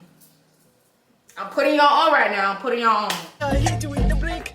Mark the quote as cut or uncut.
cut